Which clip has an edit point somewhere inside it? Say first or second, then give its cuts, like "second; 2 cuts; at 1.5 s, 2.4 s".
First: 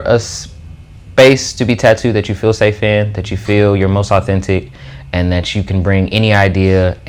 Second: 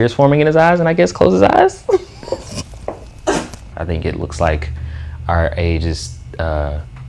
second; 1 cut; at 3.7 s